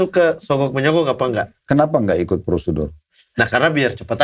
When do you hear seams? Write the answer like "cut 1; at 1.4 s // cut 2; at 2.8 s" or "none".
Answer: cut 1; at 1.6 s

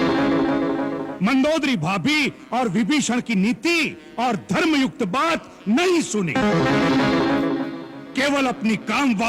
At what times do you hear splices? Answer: none

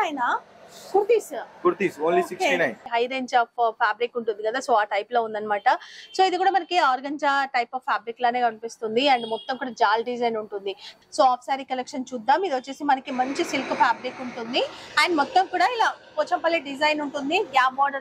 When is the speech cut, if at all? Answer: cut 1; at 2.9 s // cut 2; at 10.9 s

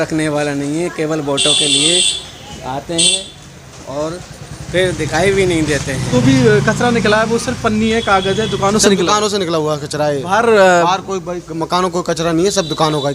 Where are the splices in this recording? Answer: cut 1; at 6.1 s

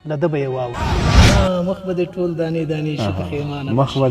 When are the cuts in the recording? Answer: cut 1; at 1.2 s

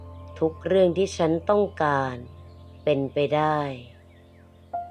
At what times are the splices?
cut 1; at 3.8 s

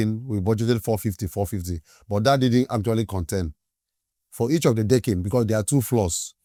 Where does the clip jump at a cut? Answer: none

